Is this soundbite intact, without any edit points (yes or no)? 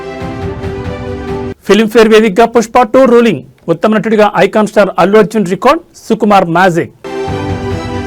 yes